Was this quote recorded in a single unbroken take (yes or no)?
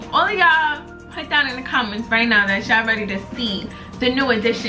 yes